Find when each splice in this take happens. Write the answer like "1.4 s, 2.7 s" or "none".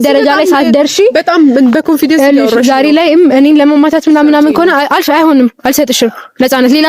none